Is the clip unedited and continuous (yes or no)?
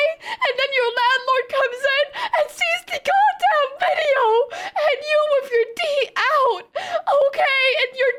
yes